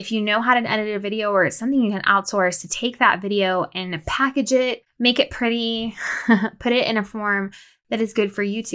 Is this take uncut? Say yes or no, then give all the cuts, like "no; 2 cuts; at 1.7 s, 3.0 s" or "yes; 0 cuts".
no; 1 cut; at 4.9 s